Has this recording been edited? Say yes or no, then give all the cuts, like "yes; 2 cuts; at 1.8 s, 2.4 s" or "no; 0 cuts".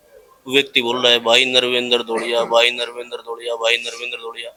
no; 0 cuts